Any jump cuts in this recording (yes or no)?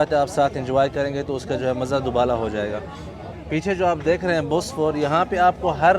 no